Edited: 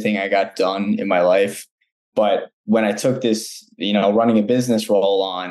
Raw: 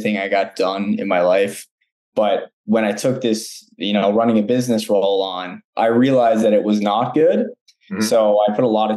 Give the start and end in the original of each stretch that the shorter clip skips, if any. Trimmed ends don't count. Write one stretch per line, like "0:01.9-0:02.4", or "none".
none

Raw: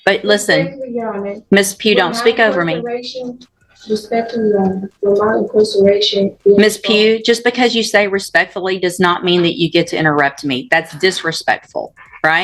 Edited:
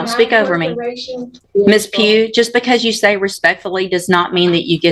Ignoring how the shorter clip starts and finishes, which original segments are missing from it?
0:03.5-0:06.4

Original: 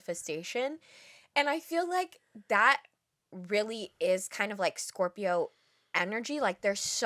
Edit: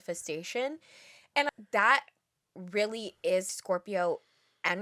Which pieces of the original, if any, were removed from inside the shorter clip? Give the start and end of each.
0:01.5-0:02.3
0:04.3-0:04.8

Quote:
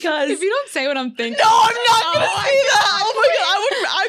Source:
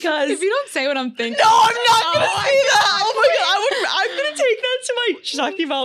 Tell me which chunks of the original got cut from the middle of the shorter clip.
none

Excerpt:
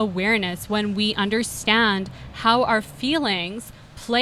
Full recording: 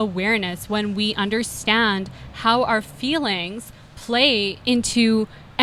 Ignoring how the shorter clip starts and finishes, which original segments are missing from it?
none

